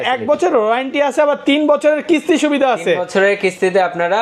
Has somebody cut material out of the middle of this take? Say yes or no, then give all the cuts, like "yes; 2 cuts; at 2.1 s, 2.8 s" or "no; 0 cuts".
no; 0 cuts